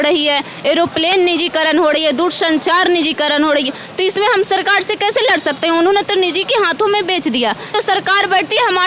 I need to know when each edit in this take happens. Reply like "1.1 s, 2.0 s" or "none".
7.7 s